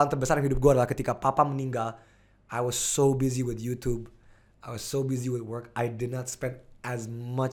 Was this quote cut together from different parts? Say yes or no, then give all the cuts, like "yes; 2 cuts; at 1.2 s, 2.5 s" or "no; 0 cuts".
no; 0 cuts